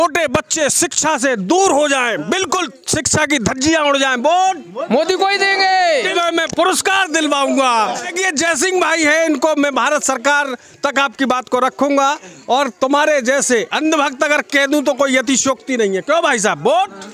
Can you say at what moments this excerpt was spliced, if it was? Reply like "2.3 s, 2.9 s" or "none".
6.1 s, 8.1 s